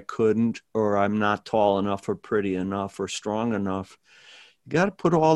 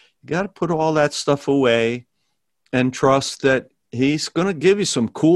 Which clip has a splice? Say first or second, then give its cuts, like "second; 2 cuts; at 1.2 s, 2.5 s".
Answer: second; 1 cut; at 3.8 s